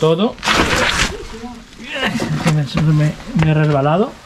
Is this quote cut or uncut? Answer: uncut